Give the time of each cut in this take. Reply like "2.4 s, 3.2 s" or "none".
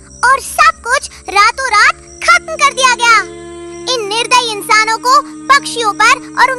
none

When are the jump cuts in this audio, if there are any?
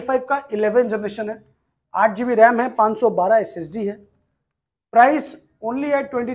none

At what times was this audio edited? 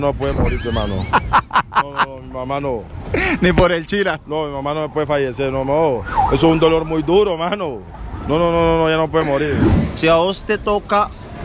9.8 s

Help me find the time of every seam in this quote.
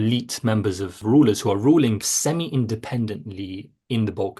1.0 s, 2.1 s

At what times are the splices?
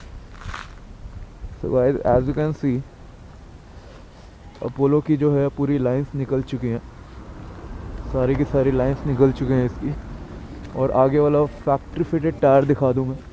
none

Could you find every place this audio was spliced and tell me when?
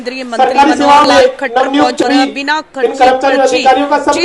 2.0 s

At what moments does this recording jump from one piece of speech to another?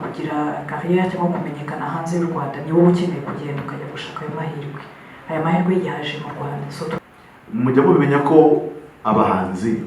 7.0 s

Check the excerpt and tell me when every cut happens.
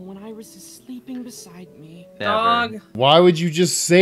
2.9 s

